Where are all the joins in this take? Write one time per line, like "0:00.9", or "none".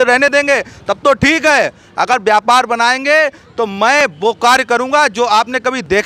none